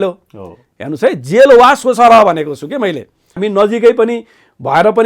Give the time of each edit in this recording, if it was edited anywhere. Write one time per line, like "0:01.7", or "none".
0:03.3